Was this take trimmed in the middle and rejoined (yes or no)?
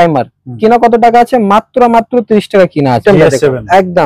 yes